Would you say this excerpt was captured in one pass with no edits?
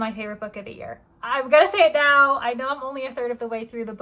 yes; 0 cuts

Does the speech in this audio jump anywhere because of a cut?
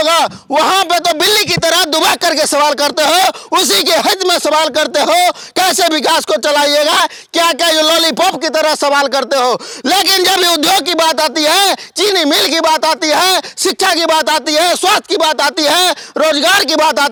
no; 0 cuts

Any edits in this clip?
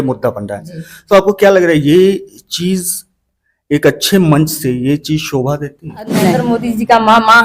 yes; 1 cut; at 6.4 s

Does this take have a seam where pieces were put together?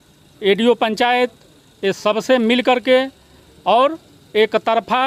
no; 0 cuts

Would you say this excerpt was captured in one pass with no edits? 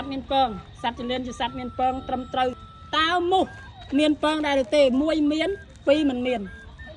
no; 1 cut; at 2.6 s

